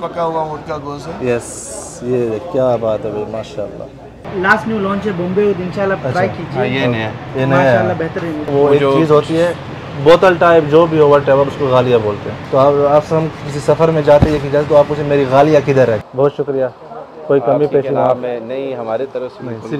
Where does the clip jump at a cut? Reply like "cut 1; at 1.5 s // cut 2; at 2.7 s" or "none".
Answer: cut 1; at 4.2 s // cut 2; at 8.5 s // cut 3; at 12.3 s // cut 4; at 16.1 s

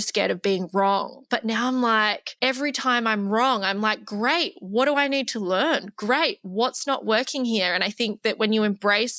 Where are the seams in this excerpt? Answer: cut 1; at 2.2 s

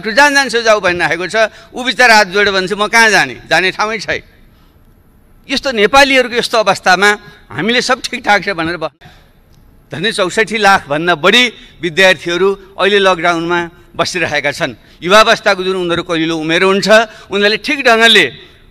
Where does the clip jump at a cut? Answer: cut 1; at 9.0 s

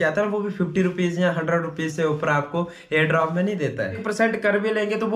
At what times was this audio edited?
cut 1; at 4.0 s

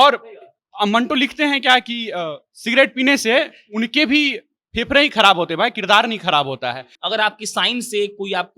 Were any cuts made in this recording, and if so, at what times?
cut 1; at 6.9 s

